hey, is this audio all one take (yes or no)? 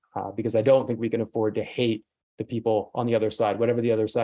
yes